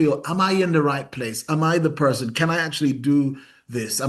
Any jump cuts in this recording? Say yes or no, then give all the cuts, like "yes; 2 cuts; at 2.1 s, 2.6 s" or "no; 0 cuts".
no; 0 cuts